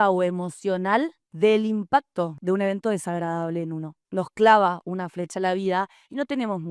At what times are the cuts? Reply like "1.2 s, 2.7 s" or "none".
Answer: 2.4 s, 4.0 s